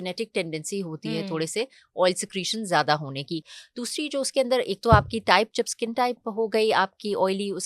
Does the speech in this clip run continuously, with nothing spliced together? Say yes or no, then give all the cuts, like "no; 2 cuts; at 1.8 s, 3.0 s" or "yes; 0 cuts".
yes; 0 cuts